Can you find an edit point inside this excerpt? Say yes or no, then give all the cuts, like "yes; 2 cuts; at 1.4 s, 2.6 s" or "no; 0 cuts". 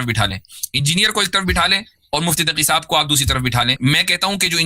yes; 1 cut; at 3.8 s